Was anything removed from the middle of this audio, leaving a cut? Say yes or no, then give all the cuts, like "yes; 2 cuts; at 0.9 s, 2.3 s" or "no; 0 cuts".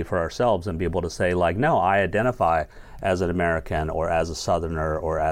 no; 0 cuts